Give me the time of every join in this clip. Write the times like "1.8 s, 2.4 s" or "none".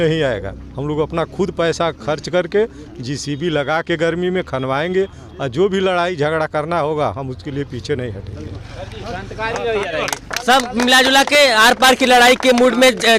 none